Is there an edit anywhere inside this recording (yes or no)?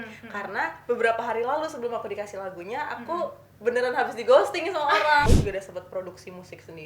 yes